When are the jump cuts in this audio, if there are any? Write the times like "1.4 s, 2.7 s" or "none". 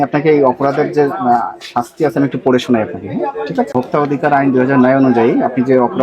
3.7 s